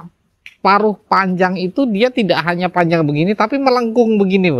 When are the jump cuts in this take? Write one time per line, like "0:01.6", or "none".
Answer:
none